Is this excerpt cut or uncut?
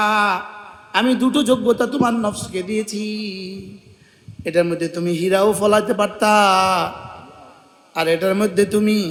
uncut